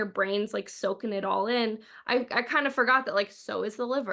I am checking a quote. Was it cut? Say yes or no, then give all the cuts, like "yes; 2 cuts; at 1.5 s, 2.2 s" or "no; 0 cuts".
no; 0 cuts